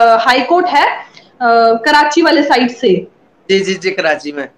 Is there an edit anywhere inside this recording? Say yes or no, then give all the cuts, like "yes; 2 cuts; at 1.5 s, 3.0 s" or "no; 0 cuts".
no; 0 cuts